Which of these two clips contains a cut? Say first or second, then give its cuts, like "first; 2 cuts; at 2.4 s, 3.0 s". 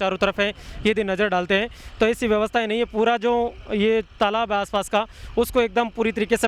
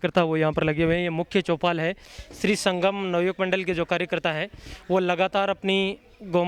second; 1 cut; at 2.4 s